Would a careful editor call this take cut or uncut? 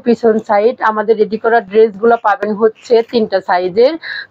uncut